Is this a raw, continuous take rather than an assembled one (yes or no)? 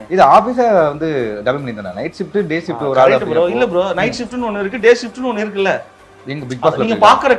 yes